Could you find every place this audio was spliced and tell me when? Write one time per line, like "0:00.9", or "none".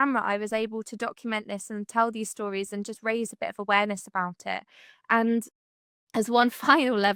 none

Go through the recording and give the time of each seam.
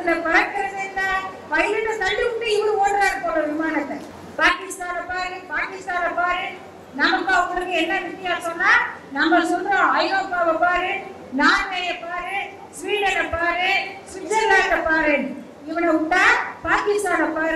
0:04.2

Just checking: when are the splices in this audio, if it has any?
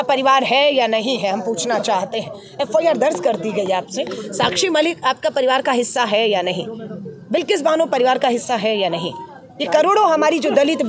none

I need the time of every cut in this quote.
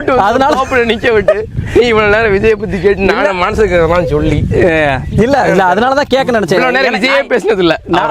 none

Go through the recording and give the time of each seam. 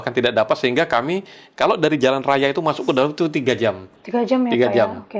none

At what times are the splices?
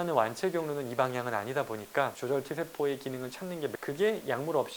0:02.2
0:03.7

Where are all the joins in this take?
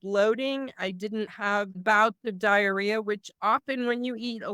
0:01.4

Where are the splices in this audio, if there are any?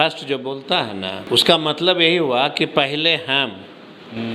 0:01.2

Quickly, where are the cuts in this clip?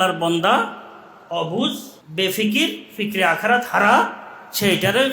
0:01.9

